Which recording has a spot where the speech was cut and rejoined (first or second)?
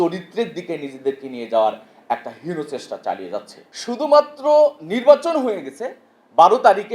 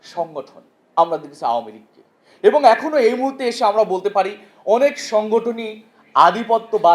first